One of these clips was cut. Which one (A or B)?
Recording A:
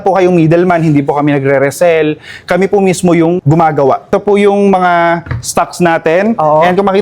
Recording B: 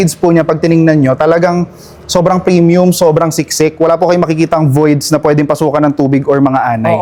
A